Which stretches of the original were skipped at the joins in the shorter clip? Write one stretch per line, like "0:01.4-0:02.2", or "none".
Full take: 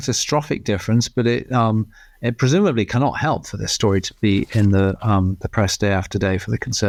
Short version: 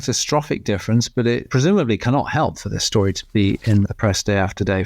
0:01.5-0:02.3
0:04.7-0:05.4